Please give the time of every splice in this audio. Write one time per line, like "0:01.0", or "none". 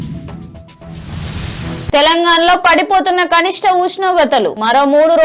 0:00.9